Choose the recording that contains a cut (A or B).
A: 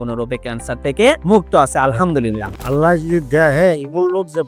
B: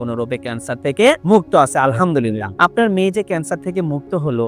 A